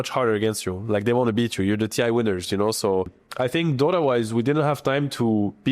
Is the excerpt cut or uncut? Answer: cut